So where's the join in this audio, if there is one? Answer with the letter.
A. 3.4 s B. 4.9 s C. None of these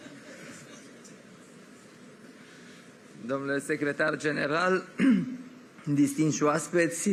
C